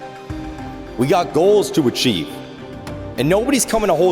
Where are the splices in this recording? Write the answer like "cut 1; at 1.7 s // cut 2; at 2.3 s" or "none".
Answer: cut 1; at 1.0 s